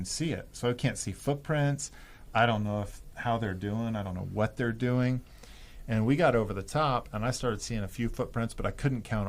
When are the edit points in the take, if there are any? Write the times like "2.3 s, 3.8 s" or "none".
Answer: none